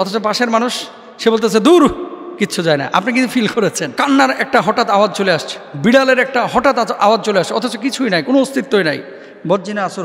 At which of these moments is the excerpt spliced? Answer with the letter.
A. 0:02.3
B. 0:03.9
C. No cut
B